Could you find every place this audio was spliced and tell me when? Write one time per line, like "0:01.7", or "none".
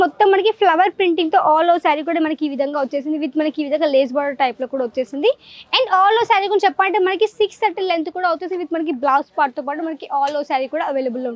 none